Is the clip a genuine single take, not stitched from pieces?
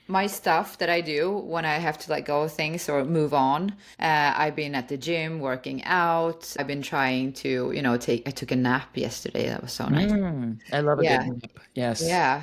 no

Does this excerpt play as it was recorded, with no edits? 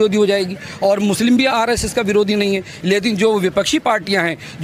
yes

